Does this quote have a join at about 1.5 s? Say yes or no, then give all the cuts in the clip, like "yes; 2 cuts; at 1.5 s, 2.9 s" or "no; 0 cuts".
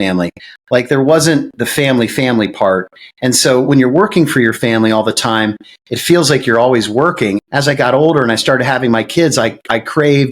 no; 1 cut; at 7.4 s